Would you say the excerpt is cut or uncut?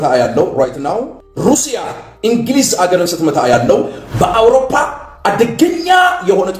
cut